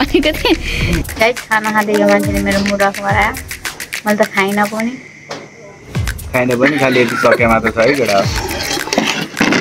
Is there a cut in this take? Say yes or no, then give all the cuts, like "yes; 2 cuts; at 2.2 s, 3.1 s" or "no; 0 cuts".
yes; 1 cut; at 1.0 s